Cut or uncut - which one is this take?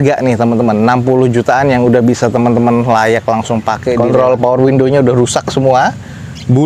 cut